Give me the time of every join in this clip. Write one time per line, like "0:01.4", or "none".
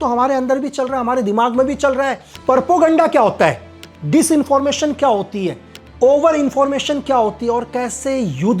0:02.3